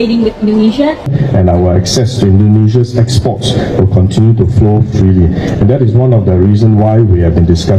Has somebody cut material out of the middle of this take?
yes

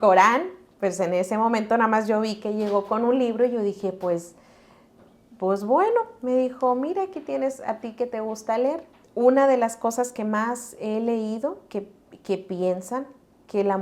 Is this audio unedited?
no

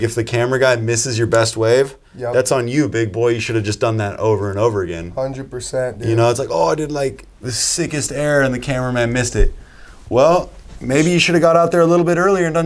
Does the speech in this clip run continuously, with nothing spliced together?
yes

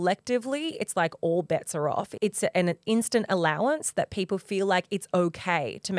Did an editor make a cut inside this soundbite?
yes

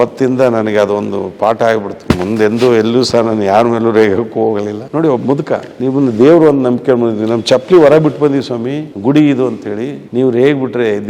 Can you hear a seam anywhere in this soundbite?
yes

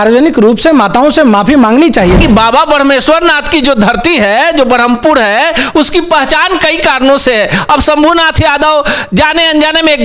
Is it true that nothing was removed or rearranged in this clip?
no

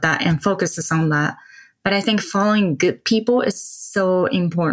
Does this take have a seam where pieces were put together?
no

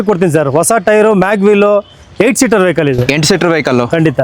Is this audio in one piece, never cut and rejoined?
yes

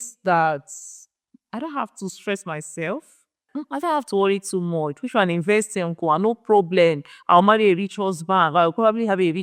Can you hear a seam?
yes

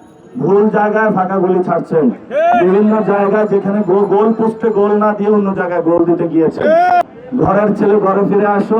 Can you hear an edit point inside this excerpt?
yes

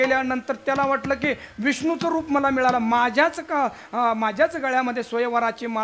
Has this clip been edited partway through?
no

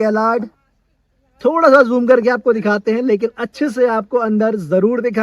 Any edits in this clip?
no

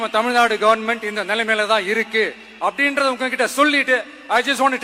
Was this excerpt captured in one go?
yes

